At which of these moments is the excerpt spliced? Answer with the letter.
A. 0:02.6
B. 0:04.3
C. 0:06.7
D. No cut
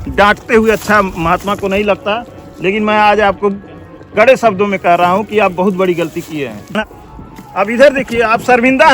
C